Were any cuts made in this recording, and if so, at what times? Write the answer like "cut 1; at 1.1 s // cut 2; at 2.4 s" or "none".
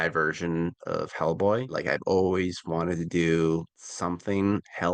none